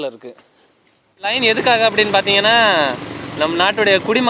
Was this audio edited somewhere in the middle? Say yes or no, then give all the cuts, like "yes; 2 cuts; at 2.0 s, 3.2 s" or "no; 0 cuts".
yes; 1 cut; at 1.3 s